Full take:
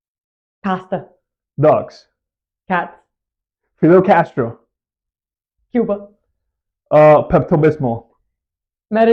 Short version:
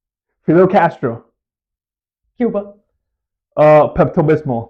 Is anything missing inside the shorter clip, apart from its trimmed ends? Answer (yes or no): no